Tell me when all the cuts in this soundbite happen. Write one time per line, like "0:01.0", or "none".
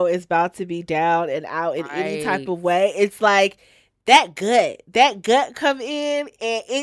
none